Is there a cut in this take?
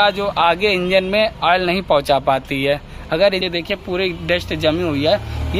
yes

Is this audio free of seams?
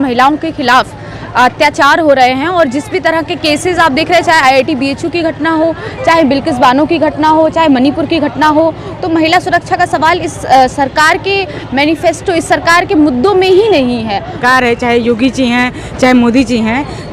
no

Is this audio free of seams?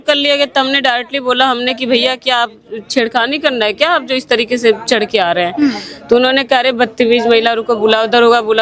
yes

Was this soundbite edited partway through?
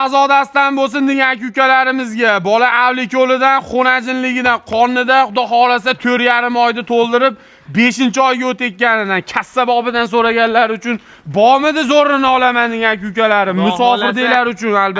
no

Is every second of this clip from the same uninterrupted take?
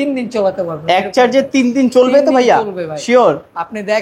yes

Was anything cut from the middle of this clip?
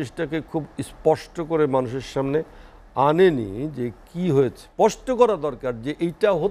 yes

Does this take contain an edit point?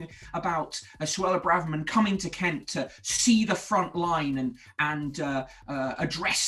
no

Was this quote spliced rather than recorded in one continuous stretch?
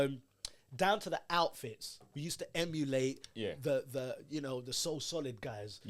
no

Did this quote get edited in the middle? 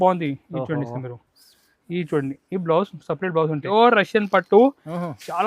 yes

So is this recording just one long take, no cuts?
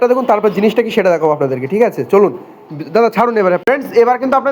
no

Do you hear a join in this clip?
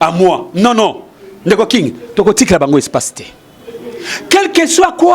no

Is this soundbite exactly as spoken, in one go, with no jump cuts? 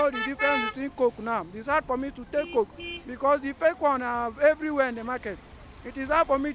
yes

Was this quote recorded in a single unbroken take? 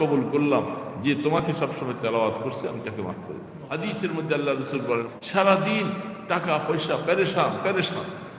no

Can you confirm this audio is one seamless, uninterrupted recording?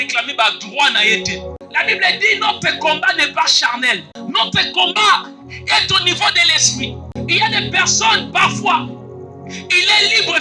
no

